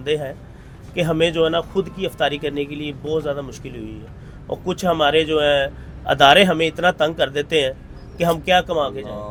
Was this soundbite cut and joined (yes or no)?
no